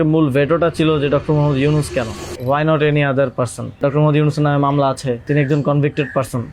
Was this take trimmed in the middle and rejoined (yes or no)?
yes